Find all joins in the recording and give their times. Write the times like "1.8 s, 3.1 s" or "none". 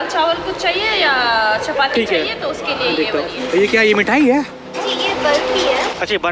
3.4 s